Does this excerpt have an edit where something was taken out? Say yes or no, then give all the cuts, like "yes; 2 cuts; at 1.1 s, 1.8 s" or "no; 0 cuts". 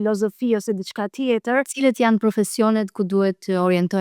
yes; 1 cut; at 1.7 s